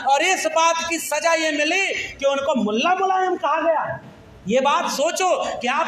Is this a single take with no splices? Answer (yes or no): yes